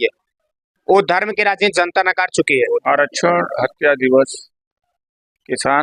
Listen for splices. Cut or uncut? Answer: cut